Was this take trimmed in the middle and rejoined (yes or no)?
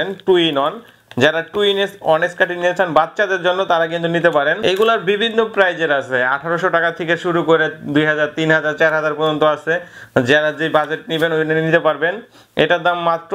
no